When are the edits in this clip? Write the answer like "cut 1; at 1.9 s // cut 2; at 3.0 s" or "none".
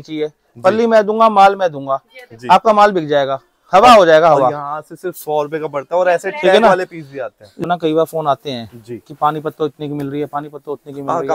cut 1; at 7.6 s

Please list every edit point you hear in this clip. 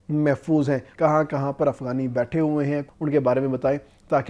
cut 1; at 0.9 s // cut 2; at 2.9 s

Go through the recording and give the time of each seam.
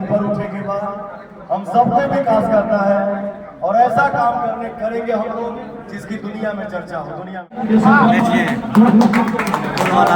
cut 1; at 7.5 s

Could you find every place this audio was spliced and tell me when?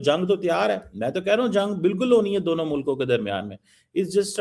none

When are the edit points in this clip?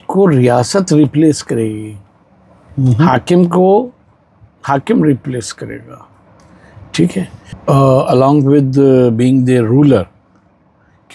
cut 1; at 7.4 s

